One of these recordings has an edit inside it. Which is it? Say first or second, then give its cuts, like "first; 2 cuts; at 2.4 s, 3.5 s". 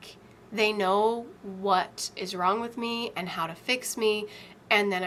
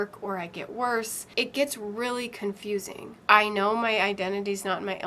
second; 2 cuts; at 1.3 s, 3.1 s